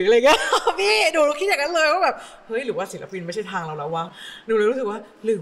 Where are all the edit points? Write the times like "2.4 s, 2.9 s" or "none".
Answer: 4.1 s